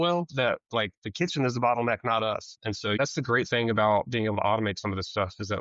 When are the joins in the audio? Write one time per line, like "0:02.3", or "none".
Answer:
0:03.0